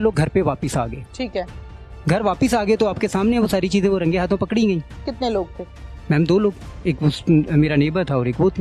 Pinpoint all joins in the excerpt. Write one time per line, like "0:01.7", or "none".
0:01.9
0:05.0